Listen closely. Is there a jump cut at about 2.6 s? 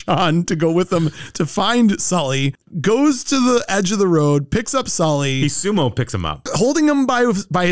yes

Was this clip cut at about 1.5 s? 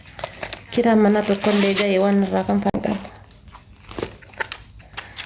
no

